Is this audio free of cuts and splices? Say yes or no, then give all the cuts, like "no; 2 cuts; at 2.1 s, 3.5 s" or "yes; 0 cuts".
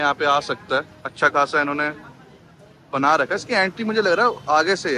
yes; 0 cuts